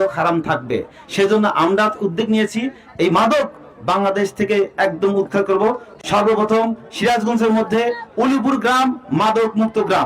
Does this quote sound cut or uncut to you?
cut